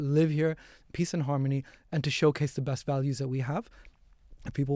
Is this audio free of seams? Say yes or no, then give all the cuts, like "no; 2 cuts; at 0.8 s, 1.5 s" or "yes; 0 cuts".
yes; 0 cuts